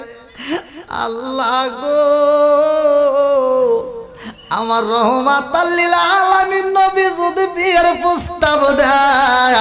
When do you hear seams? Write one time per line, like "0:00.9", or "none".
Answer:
none

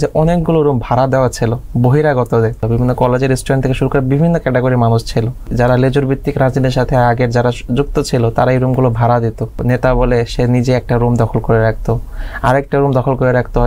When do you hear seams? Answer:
0:02.6
0:05.5
0:09.6

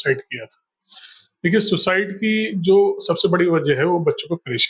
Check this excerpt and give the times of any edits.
none

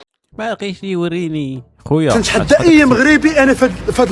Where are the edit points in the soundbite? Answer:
0:02.1

